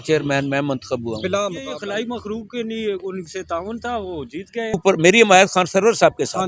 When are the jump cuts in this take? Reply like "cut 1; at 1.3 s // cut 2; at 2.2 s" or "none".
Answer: cut 1; at 1.7 s // cut 2; at 4.8 s